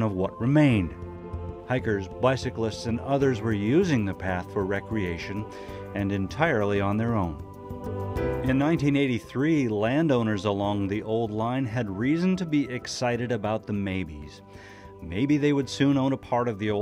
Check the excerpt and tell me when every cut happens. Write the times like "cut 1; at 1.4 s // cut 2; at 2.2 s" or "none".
cut 1; at 10.2 s